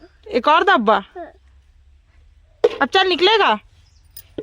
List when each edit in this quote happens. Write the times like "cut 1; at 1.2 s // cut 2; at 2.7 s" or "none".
none

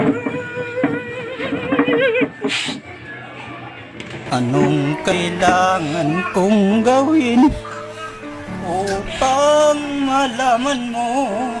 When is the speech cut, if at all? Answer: cut 1; at 4.2 s

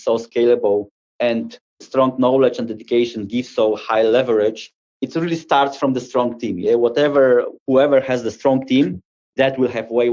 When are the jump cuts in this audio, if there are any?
cut 1; at 1.3 s

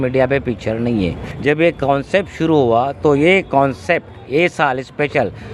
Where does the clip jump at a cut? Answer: cut 1; at 1.3 s

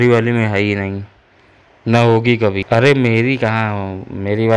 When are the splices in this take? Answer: cut 1; at 1.5 s // cut 2; at 2.6 s

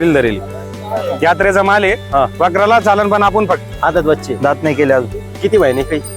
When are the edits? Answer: cut 1; at 3.6 s

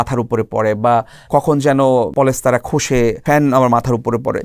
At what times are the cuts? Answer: cut 1; at 1.3 s // cut 2; at 2.1 s // cut 3; at 3.2 s

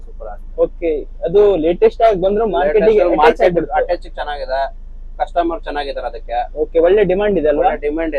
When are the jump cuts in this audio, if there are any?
none

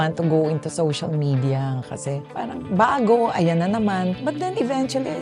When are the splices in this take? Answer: cut 1; at 2.3 s // cut 2; at 4.2 s

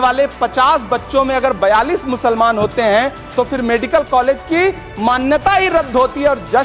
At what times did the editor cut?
none

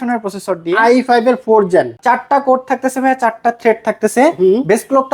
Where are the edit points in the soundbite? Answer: cut 1; at 2.0 s

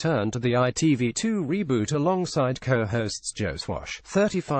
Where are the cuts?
none

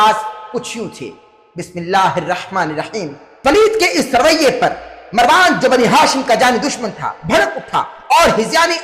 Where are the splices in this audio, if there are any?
cut 1; at 3.3 s

